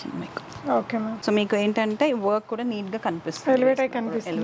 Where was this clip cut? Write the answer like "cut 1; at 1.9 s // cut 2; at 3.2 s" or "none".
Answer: cut 1; at 1.2 s